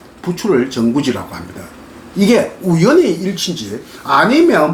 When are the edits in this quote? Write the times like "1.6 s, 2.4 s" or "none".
none